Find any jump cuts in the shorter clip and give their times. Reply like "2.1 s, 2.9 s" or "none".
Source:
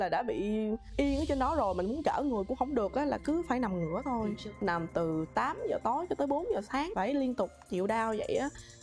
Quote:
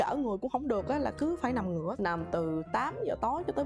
1.9 s